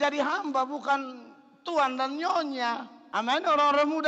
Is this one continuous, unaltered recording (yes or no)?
no